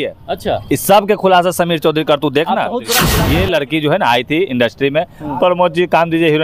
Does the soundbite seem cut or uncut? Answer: cut